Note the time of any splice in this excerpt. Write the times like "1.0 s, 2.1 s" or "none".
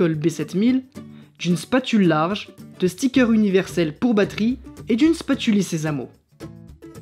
6.1 s